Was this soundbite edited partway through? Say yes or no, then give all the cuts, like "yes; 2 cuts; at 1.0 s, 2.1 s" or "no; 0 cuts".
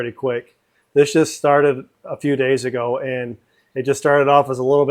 no; 0 cuts